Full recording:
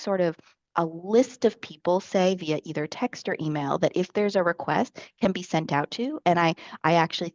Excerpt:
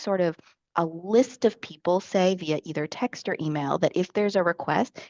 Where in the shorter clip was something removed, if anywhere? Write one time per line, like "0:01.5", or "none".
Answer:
none